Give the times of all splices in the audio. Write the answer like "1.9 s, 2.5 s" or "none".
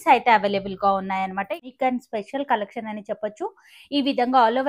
1.5 s